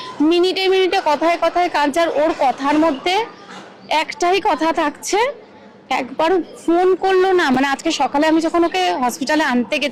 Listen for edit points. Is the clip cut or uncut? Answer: uncut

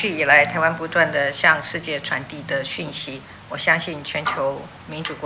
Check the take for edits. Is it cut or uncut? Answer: uncut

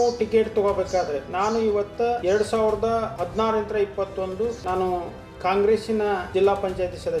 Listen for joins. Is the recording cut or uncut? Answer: cut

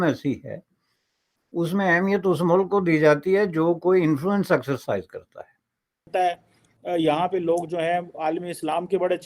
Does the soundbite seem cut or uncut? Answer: cut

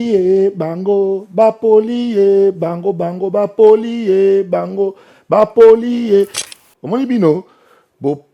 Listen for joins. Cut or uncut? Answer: cut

